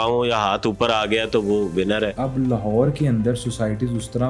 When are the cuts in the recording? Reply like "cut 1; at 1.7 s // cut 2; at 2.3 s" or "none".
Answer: cut 1; at 2.2 s